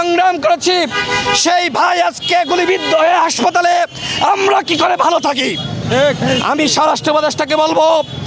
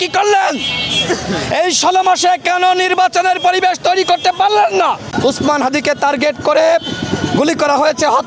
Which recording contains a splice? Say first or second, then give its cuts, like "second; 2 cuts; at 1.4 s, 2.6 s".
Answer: second; 1 cut; at 5.0 s